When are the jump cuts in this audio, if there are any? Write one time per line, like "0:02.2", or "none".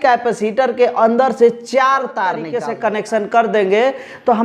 0:02.5